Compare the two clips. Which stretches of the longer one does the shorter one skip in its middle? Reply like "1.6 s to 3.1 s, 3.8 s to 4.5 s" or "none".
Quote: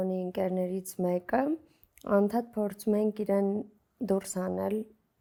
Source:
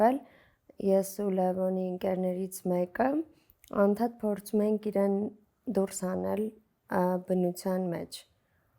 none